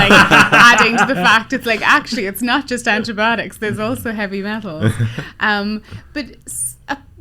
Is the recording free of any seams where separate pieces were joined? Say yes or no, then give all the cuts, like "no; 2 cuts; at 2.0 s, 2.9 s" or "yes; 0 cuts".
yes; 0 cuts